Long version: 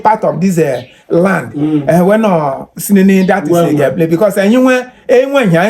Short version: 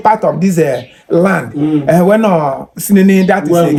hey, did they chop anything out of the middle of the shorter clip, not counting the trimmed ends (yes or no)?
no